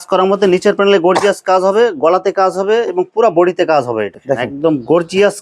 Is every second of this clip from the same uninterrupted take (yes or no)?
no